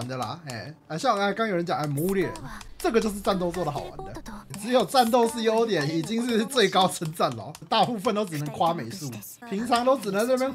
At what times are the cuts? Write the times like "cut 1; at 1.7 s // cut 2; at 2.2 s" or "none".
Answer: cut 1; at 7.5 s